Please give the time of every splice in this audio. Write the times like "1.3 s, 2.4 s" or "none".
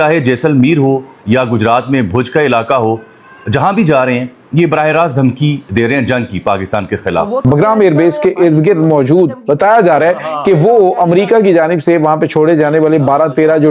7.4 s